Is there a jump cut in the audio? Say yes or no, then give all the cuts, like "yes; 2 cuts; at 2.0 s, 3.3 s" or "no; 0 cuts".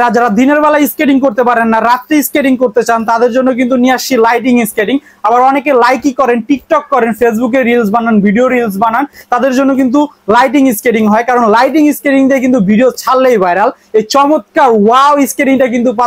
no; 0 cuts